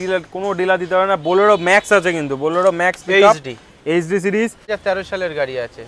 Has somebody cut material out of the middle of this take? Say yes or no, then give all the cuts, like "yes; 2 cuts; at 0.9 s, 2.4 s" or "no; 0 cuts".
yes; 1 cut; at 4.7 s